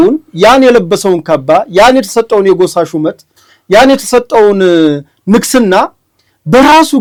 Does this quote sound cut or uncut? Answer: uncut